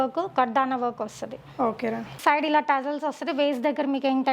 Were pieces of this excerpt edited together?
yes; 1 cut; at 2.2 s

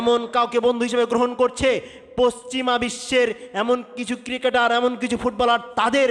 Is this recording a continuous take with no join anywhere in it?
yes; 0 cuts

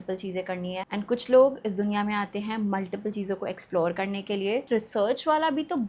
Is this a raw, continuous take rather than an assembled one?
no; 2 cuts; at 0.9 s, 4.7 s

